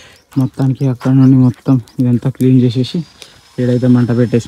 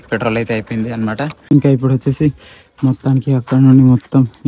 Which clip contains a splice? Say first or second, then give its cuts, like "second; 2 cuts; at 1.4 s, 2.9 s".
second; 1 cut; at 1.3 s